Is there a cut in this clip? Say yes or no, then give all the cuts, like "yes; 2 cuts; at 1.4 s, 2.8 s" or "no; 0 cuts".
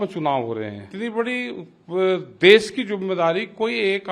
yes; 1 cut; at 0.9 s